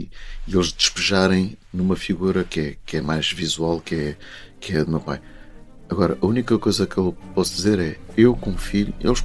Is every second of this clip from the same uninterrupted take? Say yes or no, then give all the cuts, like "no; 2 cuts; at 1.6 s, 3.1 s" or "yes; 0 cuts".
yes; 0 cuts